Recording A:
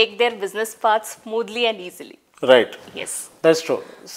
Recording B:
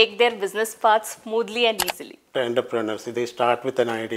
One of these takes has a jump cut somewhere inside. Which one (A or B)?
B